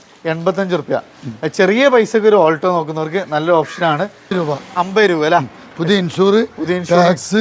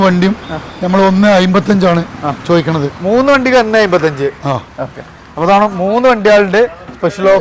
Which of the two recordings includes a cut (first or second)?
first